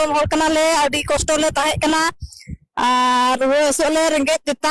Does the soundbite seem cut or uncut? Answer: uncut